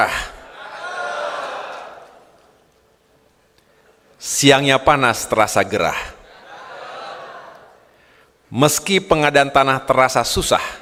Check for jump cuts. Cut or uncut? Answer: uncut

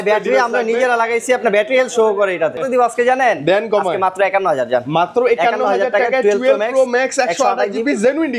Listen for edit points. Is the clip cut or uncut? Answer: cut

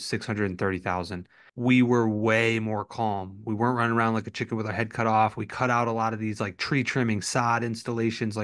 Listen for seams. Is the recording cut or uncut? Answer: cut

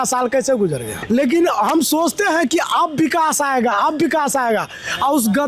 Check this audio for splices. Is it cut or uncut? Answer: cut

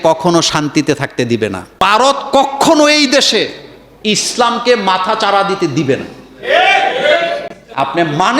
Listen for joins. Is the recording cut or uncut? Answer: cut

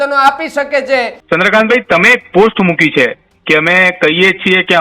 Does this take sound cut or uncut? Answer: cut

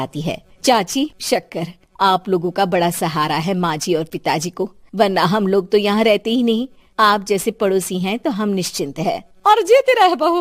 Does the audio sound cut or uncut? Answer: uncut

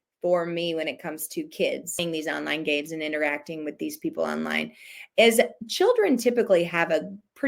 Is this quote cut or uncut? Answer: cut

